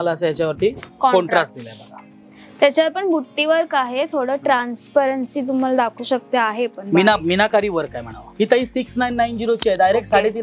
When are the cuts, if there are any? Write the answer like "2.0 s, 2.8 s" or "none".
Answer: 8.2 s